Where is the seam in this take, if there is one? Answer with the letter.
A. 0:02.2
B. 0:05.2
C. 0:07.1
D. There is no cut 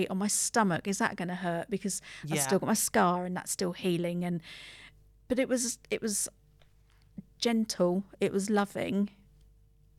B